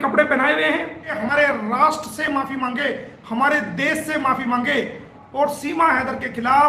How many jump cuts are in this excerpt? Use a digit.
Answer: 2